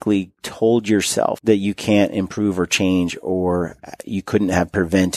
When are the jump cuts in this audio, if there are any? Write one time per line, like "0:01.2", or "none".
0:01.4